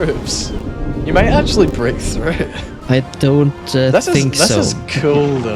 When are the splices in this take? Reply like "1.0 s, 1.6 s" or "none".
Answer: 1.0 s